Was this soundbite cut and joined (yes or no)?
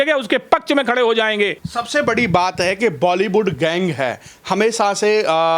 no